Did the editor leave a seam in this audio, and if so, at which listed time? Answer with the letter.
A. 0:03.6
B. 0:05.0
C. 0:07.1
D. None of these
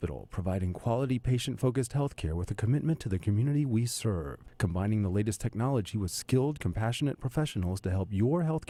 D